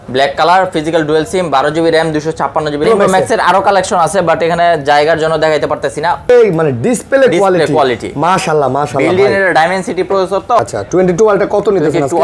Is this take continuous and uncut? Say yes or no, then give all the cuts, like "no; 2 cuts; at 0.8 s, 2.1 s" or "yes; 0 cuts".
no; 3 cuts; at 2.8 s, 6.3 s, 10.6 s